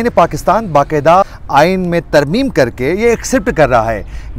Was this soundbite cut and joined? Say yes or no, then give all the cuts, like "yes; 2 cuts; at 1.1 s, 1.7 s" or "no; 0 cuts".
yes; 1 cut; at 1.2 s